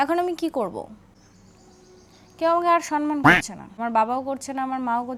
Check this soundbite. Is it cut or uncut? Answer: uncut